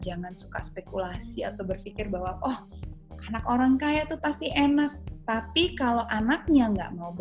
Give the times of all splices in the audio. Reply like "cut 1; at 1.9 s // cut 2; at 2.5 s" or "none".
cut 1; at 5.1 s